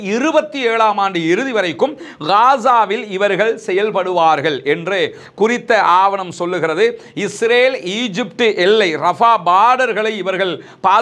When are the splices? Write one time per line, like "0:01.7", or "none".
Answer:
none